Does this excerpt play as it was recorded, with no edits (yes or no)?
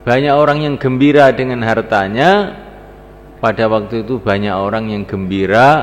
yes